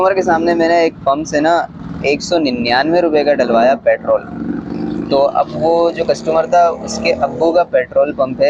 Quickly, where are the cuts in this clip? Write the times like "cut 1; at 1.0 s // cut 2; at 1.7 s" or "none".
none